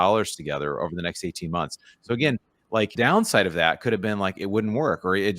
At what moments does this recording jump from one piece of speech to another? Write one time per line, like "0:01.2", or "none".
0:02.9

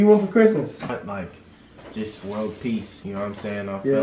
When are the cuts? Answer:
0:00.9

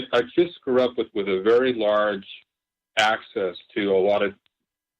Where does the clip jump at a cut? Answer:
none

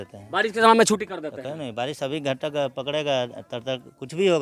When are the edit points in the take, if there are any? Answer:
none

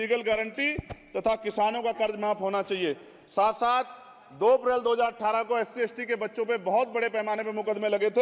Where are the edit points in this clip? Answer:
none

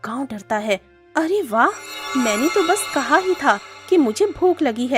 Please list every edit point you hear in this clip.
0:01.0

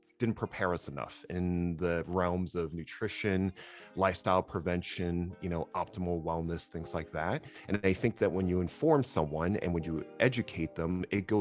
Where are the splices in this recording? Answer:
0:07.5

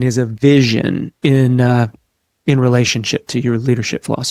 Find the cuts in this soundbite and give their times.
0:01.1

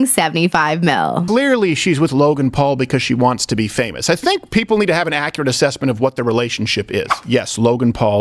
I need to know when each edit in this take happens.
0:01.3

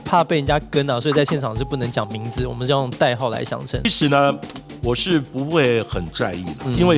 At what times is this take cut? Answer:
0:03.8

